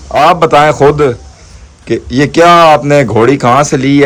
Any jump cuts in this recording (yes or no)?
no